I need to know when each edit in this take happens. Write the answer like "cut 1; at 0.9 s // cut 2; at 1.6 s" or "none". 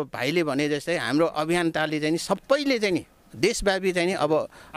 none